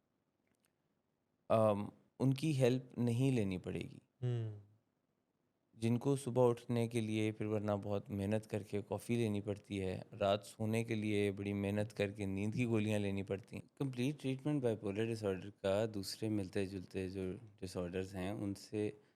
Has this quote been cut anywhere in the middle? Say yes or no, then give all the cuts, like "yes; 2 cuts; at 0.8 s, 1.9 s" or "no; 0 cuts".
yes; 1 cut; at 13.6 s